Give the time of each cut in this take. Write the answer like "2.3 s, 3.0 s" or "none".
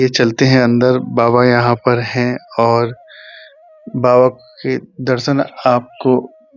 none